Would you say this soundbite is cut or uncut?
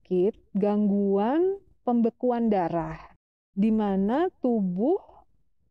uncut